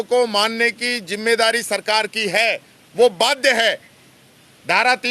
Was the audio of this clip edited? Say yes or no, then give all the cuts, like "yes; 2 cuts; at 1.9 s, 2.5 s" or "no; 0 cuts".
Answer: no; 0 cuts